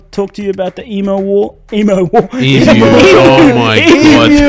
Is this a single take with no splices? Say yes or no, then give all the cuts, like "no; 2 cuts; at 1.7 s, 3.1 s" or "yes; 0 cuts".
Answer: yes; 0 cuts